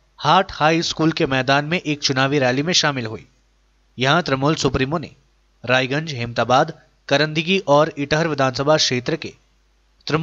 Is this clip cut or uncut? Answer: uncut